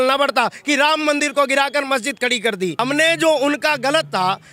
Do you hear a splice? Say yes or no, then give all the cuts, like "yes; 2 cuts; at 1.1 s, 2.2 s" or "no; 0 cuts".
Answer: yes; 1 cut; at 2.7 s